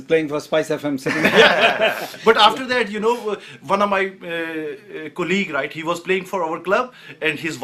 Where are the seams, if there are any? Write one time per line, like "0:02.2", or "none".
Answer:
none